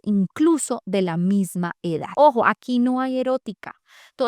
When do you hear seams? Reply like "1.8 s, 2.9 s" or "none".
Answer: 2.1 s